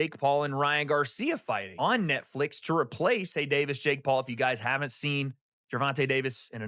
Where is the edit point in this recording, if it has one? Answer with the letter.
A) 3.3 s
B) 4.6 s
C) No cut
A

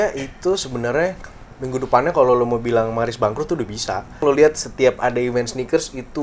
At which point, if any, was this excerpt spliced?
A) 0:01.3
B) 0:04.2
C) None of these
B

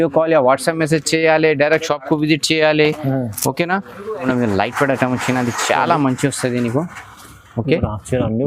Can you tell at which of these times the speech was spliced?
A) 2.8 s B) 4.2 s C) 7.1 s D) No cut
B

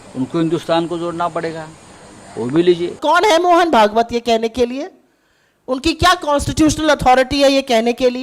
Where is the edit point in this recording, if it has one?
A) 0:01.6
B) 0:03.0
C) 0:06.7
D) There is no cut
B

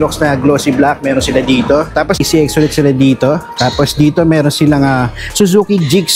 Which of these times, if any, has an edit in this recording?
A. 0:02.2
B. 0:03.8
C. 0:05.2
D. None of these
A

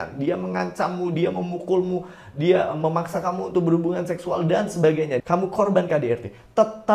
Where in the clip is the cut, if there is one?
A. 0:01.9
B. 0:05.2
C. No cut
B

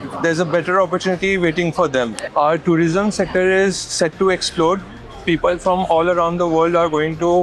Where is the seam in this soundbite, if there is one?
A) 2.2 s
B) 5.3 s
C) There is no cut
A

